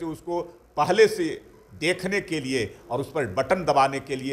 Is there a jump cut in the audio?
no; 0 cuts

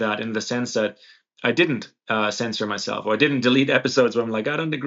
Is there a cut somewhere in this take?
no; 0 cuts

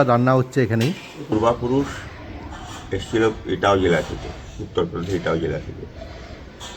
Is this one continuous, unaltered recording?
no; 1 cut; at 1.3 s

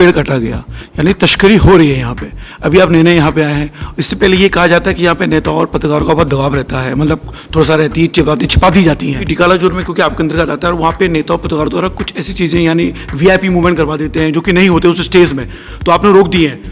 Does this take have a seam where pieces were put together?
yes; 1 cut; at 9.3 s

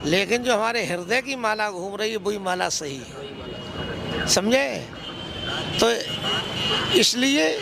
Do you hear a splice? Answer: no; 0 cuts

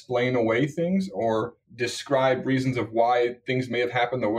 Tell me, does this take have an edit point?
yes; 1 cut; at 1.6 s

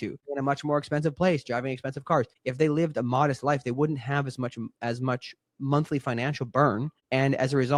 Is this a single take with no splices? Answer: yes; 0 cuts

